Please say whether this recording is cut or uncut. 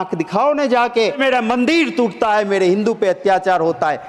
cut